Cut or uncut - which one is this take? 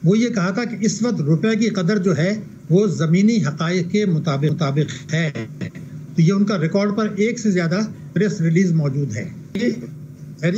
cut